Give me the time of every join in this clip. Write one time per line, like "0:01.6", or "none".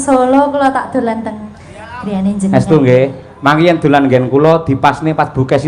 none